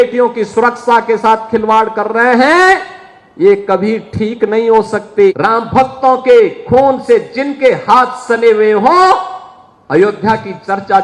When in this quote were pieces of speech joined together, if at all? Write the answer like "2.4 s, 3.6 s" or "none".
5.4 s